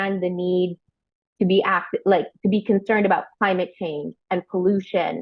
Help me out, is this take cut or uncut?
uncut